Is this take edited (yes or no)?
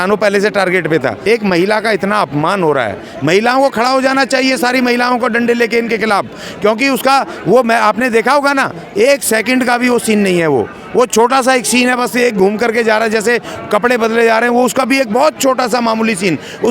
yes